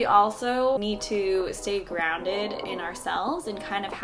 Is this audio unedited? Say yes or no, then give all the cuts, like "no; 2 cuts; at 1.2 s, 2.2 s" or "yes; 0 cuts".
no; 2 cuts; at 0.8 s, 2.7 s